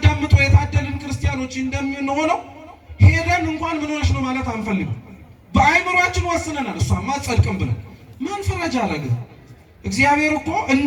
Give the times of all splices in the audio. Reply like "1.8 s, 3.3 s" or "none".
none